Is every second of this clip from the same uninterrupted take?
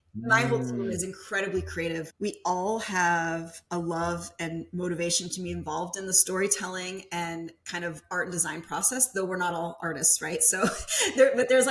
no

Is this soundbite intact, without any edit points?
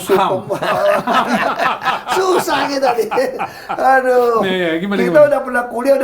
yes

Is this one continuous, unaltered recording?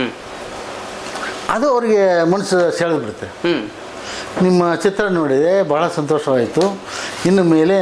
yes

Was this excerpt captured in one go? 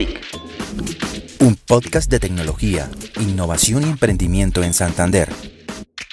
yes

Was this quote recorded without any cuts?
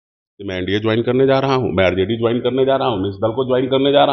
yes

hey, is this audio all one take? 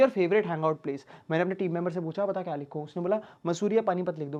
yes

